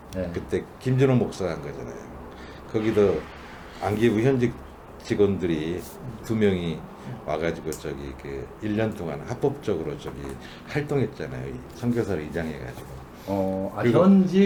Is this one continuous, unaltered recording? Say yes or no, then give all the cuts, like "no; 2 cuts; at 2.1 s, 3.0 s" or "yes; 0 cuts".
yes; 0 cuts